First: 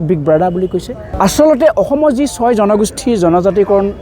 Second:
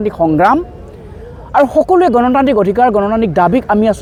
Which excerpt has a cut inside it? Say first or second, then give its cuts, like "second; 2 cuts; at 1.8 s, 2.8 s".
first; 1 cut; at 1.2 s